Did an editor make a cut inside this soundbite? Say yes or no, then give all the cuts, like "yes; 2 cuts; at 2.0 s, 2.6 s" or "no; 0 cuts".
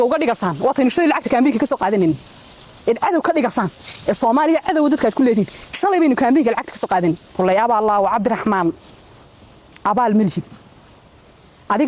yes; 1 cut; at 7.3 s